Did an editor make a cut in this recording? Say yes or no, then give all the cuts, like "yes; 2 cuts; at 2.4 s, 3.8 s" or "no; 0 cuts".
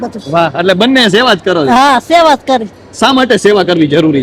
no; 0 cuts